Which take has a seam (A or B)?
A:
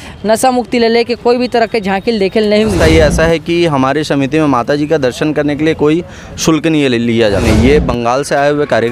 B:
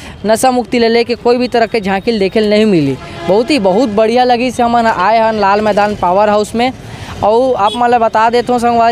A